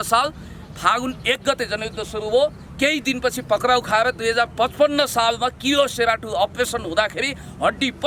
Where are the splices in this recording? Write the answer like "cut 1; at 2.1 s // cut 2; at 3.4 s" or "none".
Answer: none